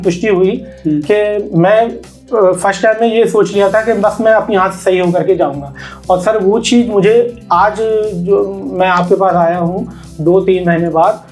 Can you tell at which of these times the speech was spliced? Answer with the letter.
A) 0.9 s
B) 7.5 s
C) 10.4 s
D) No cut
D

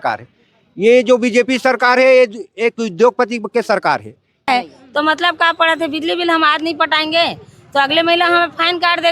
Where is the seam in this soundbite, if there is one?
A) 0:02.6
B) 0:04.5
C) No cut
B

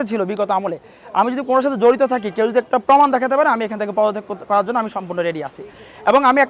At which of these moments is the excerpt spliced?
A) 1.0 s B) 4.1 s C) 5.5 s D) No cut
D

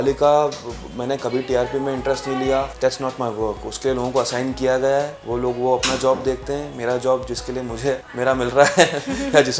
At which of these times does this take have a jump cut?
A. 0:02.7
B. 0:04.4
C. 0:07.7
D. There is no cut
A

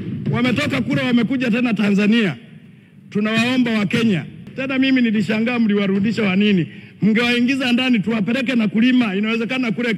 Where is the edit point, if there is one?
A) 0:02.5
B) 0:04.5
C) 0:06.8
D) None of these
B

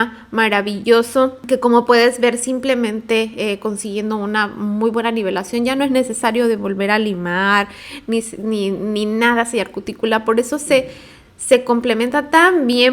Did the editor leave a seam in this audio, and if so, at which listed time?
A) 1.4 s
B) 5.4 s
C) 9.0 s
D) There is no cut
A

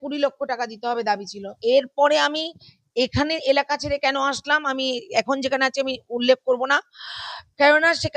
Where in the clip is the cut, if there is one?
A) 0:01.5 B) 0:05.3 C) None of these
A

